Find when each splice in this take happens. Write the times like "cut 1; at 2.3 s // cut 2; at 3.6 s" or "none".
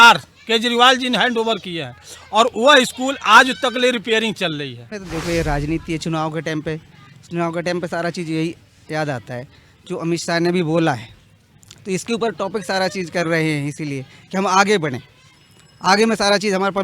cut 1; at 4.9 s